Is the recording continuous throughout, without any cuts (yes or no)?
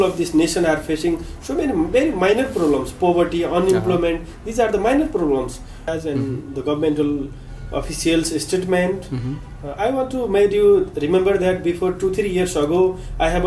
no